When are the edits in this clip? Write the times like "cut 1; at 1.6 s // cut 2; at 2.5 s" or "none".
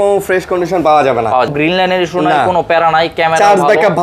cut 1; at 1.5 s